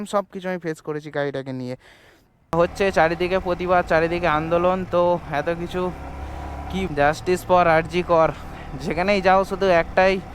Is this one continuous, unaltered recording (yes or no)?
no